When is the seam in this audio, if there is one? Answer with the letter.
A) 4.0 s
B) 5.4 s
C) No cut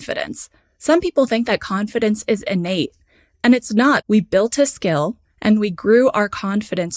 A